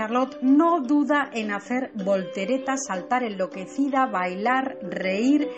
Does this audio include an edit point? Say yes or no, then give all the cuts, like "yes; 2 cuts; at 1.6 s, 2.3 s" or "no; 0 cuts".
yes; 1 cut; at 2.9 s